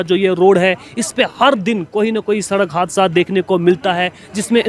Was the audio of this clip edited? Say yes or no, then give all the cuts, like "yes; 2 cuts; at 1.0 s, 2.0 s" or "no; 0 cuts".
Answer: no; 0 cuts